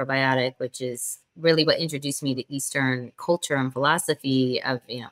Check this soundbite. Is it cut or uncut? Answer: uncut